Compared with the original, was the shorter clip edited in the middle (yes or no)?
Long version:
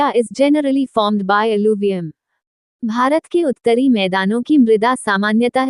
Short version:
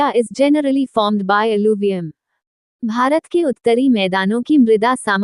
no